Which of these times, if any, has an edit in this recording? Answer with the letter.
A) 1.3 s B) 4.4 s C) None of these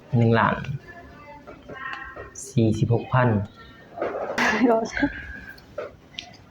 B